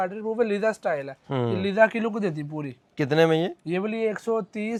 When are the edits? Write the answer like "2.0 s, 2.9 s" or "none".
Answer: none